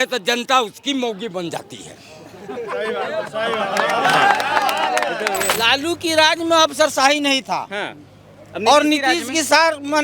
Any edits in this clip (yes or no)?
yes